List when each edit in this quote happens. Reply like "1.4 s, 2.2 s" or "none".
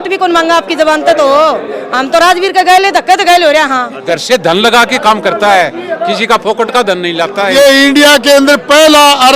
4.0 s, 7.5 s